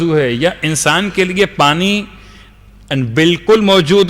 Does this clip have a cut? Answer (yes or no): no